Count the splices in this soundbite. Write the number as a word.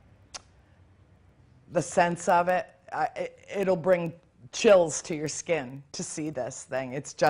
one